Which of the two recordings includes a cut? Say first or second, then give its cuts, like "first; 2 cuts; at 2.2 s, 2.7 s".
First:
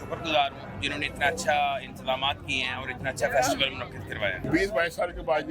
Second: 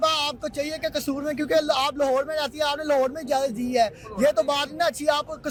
first; 1 cut; at 4.4 s